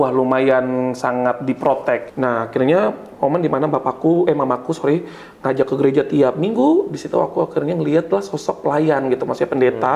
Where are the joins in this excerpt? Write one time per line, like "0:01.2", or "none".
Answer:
0:02.0